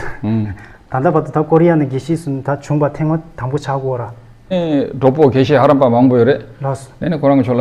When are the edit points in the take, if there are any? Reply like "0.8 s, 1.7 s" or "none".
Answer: 4.5 s